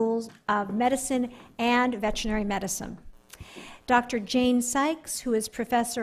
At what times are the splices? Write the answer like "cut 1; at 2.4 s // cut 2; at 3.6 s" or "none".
cut 1; at 1.2 s